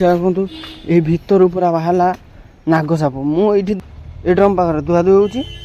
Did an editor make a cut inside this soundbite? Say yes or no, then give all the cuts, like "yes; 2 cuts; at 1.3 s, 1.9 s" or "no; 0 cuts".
yes; 1 cut; at 3.8 s